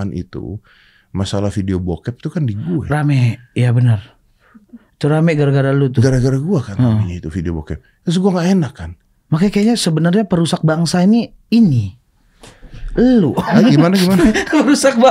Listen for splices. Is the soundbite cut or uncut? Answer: uncut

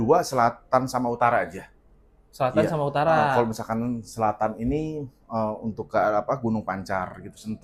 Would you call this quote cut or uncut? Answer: uncut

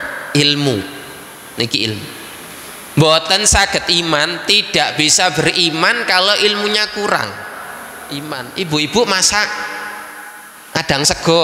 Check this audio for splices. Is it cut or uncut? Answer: cut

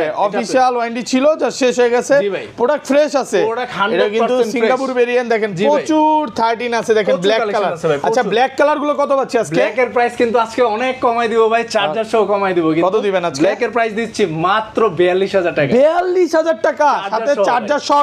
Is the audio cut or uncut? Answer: uncut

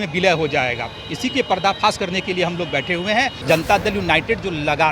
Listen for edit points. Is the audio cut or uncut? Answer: cut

